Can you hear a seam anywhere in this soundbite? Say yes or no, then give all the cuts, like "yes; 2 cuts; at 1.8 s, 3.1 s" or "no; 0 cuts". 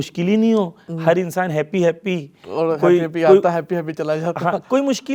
no; 0 cuts